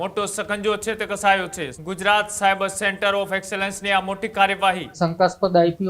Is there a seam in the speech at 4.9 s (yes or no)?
yes